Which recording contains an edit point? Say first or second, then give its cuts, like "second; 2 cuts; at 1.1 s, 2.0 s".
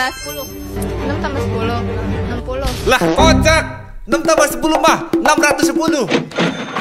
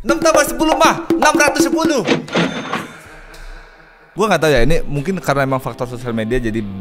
second; 1 cut; at 4.1 s